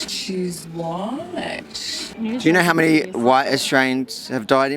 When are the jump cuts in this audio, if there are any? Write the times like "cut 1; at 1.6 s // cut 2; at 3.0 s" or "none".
cut 1; at 2.1 s

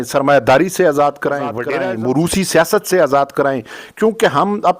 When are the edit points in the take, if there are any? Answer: cut 1; at 1.6 s

